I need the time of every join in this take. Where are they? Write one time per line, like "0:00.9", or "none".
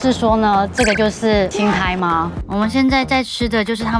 0:02.4